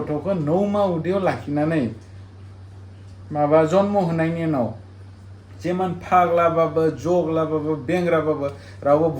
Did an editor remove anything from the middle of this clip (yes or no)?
no